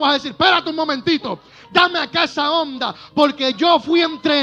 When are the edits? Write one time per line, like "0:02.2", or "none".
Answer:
none